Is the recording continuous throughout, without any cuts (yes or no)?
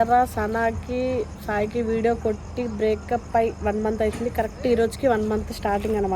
yes